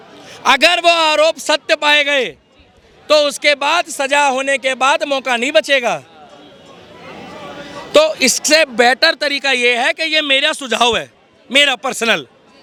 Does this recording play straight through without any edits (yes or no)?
yes